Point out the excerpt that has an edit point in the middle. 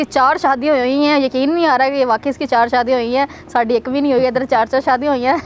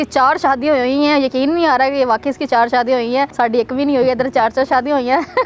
second; 1 cut; at 3.3 s

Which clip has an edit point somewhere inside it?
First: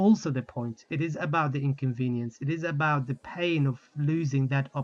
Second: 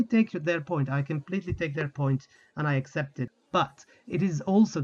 second; 1 cut; at 3.3 s

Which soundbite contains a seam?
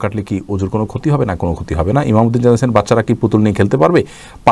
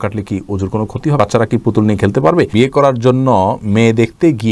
second; 2 cuts; at 1.2 s, 2.5 s

